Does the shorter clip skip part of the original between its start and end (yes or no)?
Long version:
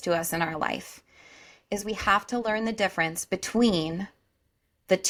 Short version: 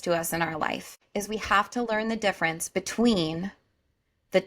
yes